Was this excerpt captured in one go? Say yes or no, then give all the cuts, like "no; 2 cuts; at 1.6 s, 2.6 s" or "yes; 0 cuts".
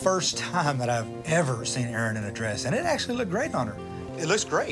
yes; 0 cuts